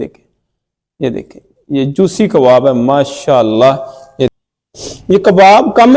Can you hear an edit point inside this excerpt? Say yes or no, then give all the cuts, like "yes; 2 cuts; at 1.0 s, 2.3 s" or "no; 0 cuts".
yes; 1 cut; at 4.4 s